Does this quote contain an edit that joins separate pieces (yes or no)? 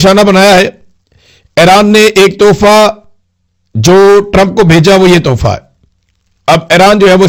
no